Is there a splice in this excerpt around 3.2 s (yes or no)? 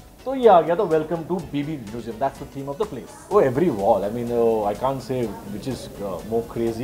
yes